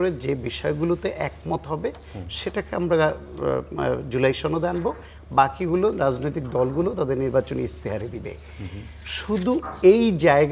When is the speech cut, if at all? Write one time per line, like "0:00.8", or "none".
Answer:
none